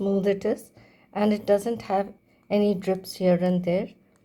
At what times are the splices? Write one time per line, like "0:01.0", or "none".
0:02.2

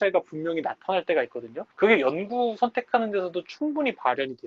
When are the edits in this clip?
0:01.6

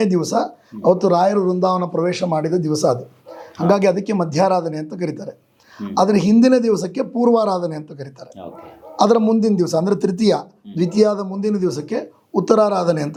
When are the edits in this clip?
none

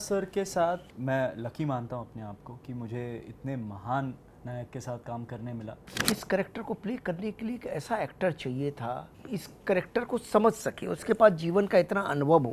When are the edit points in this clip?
0:00.9
0:06.0
0:09.1

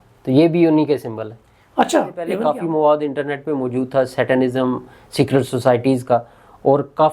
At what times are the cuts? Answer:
0:02.4

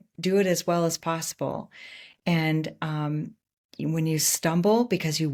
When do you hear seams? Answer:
none

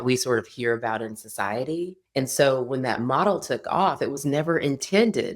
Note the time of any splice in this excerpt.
0:02.0

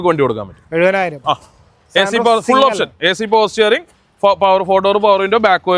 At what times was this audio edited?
none

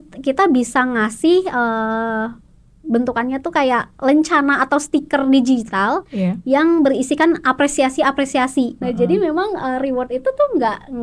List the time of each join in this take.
0:08.8

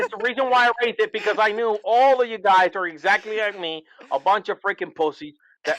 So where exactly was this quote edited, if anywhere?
none

